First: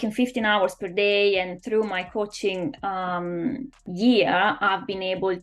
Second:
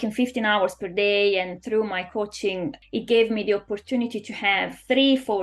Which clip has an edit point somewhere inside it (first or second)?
second